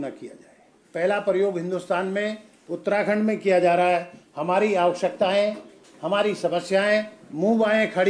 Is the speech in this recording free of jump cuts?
yes; 0 cuts

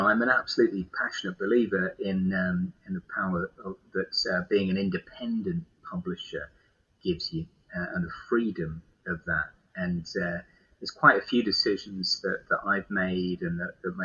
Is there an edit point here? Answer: no; 0 cuts

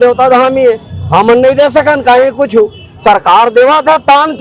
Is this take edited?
no; 0 cuts

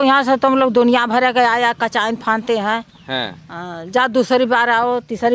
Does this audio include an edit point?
no; 0 cuts

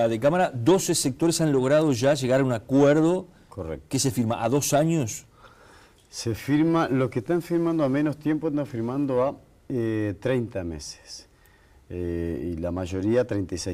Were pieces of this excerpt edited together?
no; 0 cuts

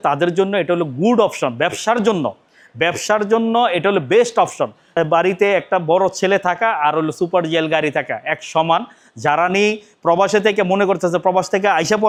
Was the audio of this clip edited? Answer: no; 0 cuts

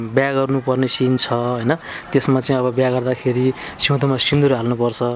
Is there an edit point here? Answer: no; 0 cuts

